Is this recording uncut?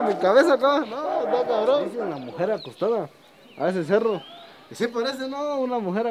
no; 1 cut; at 2.1 s

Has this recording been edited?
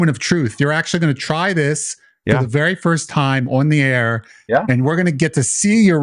no; 0 cuts

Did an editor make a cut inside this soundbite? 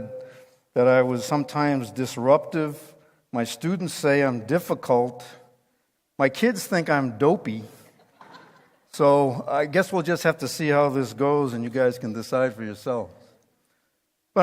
yes; 1 cut; at 12.2 s

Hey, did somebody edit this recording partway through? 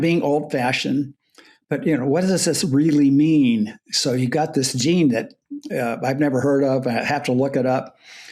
no; 0 cuts

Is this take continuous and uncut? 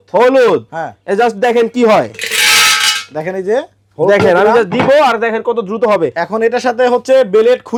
yes; 0 cuts

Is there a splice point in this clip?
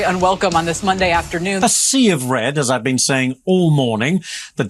yes; 1 cut; at 1.6 s

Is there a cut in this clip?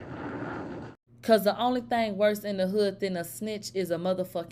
yes; 1 cut; at 1.0 s

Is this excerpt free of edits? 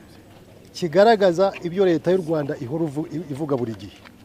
yes; 0 cuts

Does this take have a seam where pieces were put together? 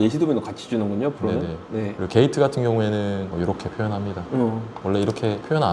yes; 2 cuts; at 2.0 s, 4.8 s

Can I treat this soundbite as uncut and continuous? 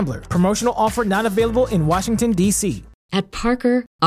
no; 1 cut; at 2.9 s

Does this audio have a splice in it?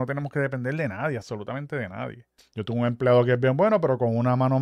yes; 1 cut; at 2.4 s

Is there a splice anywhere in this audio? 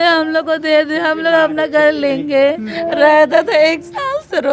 yes; 1 cut; at 2.7 s

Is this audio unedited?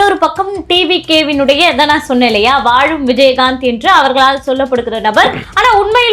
yes; 0 cuts

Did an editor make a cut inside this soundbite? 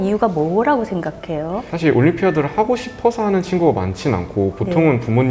yes; 1 cut; at 1.7 s

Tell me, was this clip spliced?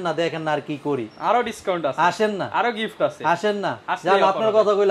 no; 0 cuts

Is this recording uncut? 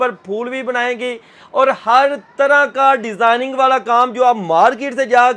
yes; 0 cuts

